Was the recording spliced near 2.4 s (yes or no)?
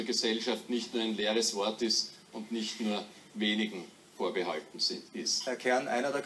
no